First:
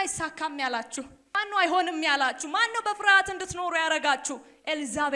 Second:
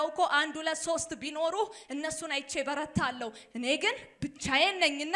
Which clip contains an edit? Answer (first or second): first